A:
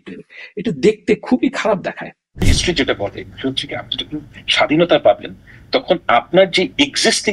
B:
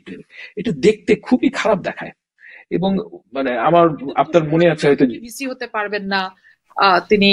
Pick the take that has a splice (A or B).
A